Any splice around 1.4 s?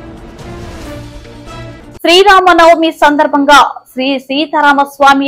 yes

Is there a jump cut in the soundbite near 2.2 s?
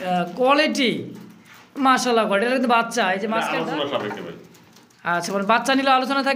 no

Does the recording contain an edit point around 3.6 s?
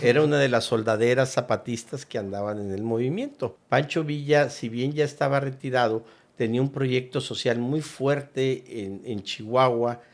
yes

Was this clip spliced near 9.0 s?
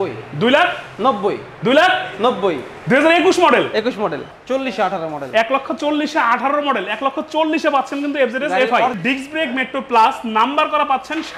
yes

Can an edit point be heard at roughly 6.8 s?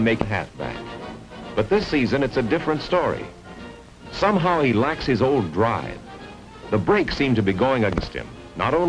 no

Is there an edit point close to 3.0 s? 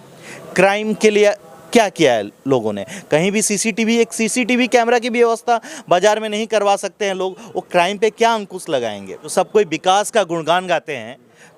no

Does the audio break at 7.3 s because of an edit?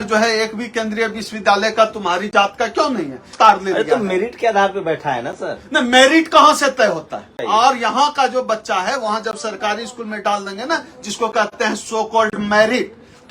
yes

